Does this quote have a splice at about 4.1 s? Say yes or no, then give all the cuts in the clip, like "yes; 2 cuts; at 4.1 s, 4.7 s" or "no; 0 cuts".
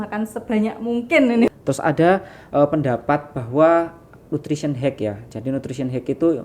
no; 1 cut; at 1.5 s